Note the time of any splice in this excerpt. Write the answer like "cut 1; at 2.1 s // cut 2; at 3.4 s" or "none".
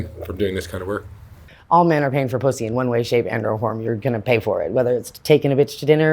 cut 1; at 1.5 s